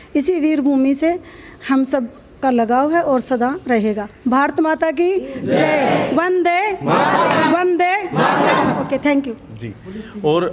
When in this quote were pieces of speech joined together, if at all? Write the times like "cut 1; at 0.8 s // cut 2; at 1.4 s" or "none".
none